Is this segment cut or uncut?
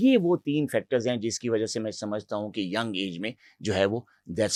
uncut